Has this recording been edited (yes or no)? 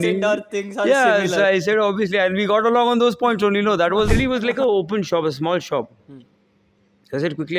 yes